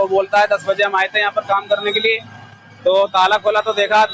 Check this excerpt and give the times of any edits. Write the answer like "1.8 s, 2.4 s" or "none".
none